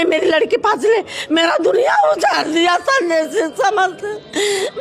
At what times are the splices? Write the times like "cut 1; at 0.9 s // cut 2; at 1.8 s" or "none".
none